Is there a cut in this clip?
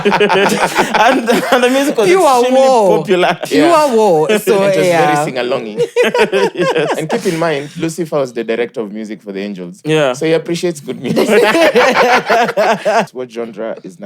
yes; 1 cut; at 13.1 s

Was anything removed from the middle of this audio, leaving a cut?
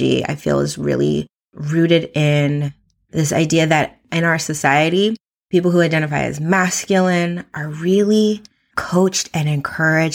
yes; 1 cut; at 5.3 s

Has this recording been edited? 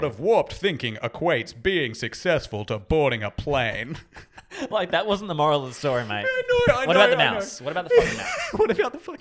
no; 0 cuts

